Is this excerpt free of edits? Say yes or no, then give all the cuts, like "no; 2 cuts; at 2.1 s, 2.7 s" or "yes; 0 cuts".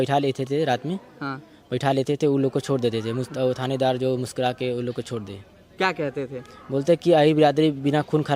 yes; 0 cuts